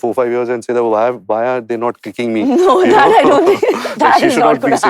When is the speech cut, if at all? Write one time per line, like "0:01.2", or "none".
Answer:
none